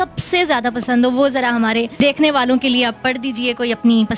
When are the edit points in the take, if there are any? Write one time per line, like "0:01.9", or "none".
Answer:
0:01.9